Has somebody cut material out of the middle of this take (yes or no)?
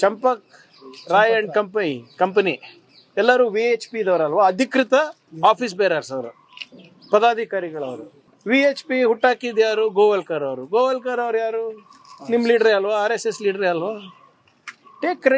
no